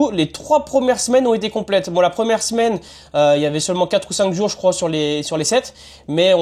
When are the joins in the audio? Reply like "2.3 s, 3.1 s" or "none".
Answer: none